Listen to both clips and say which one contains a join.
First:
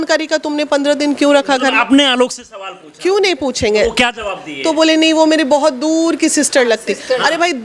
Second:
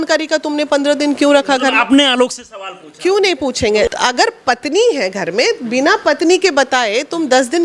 second; 1 cut; at 3.9 s

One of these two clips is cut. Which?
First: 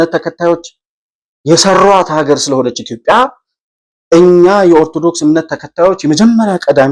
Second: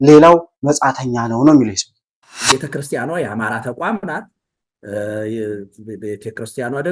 second; 1 cut; at 2.4 s

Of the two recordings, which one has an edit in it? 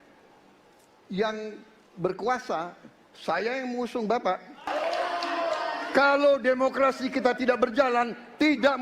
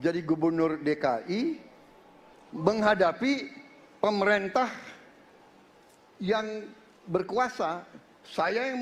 first; 1 cut; at 4.7 s

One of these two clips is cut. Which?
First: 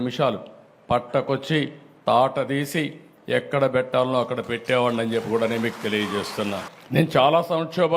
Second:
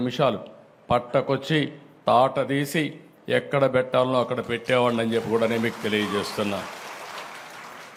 first; 1 cut; at 6.7 s

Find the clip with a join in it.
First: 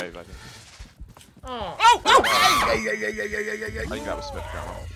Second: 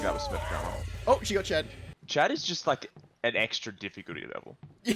second; 1 cut; at 1.9 s

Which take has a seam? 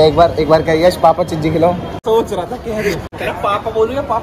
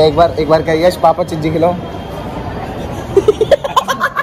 first; 2 cuts; at 2.0 s, 3.0 s

